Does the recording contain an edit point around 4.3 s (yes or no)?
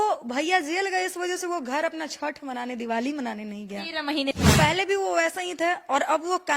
yes